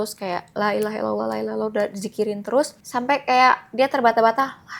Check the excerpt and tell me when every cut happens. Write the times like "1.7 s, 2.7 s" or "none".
2.8 s